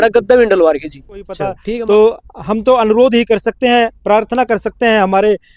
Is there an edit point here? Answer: yes; 1 cut; at 1.5 s

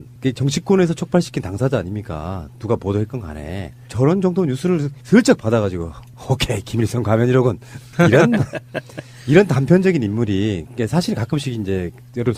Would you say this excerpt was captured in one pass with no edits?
yes; 0 cuts

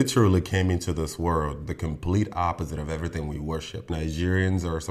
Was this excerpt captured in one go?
no; 1 cut; at 3.9 s

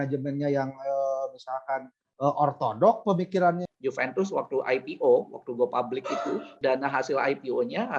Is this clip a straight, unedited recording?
no; 2 cuts; at 3.7 s, 6.5 s

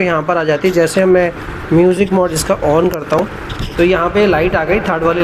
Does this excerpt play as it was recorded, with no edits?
yes; 0 cuts

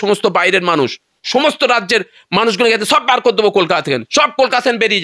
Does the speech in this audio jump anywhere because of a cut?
yes; 1 cut; at 1.2 s

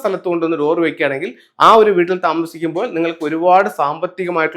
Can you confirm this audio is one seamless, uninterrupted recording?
yes; 0 cuts

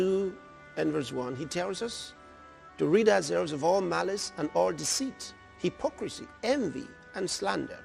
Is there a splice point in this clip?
no; 0 cuts

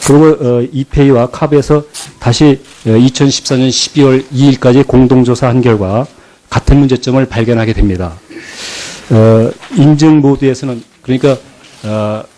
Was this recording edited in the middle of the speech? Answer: yes; 1 cut; at 6.9 s

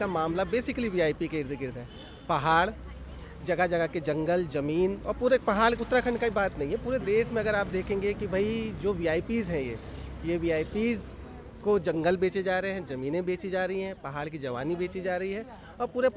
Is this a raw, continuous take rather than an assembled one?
yes; 0 cuts

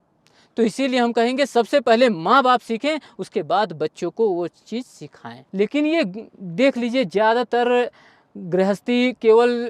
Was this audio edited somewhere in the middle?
yes; 1 cut; at 5.4 s

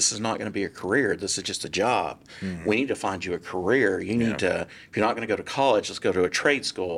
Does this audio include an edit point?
no; 0 cuts

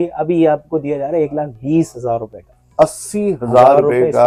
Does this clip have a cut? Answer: no; 0 cuts

